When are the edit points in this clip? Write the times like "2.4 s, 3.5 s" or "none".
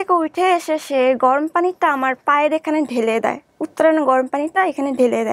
none